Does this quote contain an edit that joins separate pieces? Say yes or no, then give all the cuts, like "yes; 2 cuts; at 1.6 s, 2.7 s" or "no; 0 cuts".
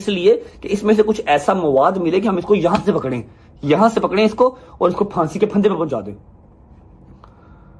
no; 0 cuts